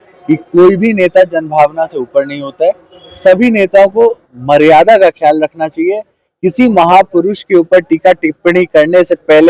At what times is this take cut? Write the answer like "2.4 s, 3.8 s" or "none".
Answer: none